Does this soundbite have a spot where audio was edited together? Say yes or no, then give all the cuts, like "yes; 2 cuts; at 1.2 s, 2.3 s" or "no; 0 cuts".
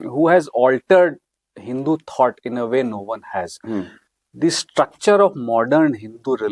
no; 0 cuts